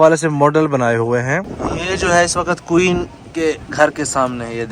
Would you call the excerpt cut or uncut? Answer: cut